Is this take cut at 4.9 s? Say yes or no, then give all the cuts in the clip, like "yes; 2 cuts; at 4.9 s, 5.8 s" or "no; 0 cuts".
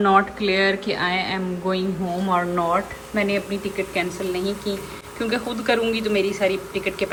no; 0 cuts